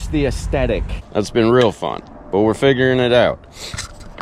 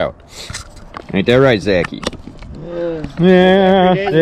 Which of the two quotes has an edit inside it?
first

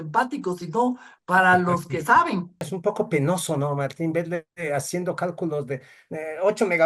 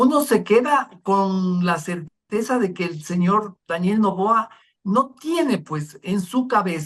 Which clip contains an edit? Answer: first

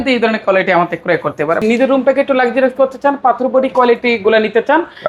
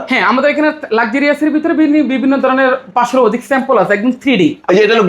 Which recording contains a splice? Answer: first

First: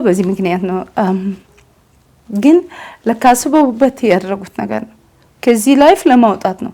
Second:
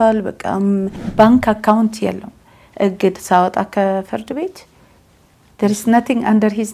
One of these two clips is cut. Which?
second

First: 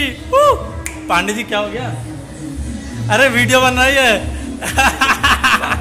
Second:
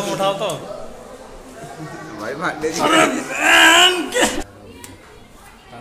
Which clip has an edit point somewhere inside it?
second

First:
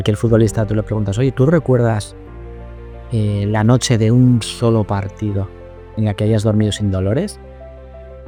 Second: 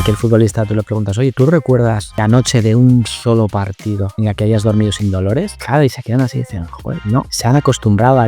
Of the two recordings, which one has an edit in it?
second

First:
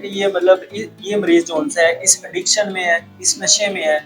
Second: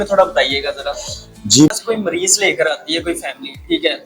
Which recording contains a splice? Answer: second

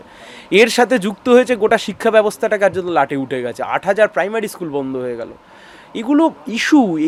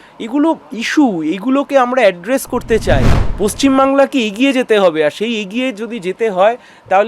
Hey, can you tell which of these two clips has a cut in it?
second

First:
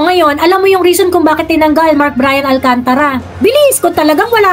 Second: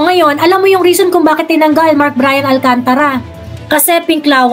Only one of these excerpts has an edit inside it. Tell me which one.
second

